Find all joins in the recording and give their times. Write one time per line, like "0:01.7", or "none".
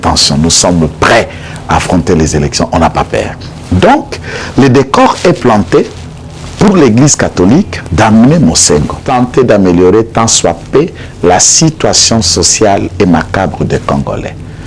0:09.0